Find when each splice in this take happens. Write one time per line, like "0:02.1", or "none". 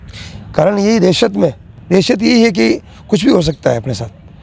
none